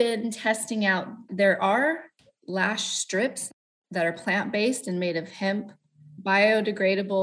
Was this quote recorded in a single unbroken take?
no; 3 cuts; at 1.2 s, 3.4 s, 6.1 s

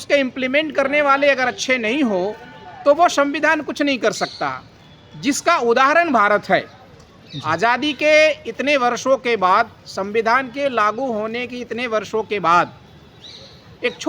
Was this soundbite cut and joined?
no; 0 cuts

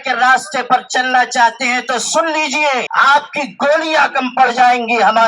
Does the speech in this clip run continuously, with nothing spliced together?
no; 1 cut; at 2.9 s

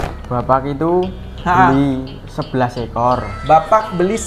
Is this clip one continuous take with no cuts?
yes; 0 cuts

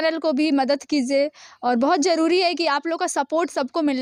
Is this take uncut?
yes; 0 cuts

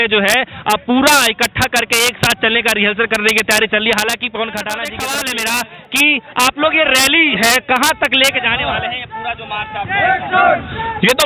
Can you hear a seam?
yes; 1 cut; at 4.9 s

